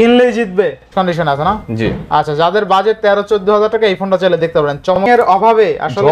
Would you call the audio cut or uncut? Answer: cut